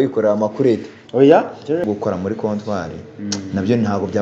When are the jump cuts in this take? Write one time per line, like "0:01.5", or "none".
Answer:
0:01.8